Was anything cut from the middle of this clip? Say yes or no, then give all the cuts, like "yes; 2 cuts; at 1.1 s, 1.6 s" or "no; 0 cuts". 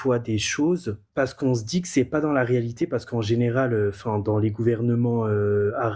yes; 1 cut; at 1.0 s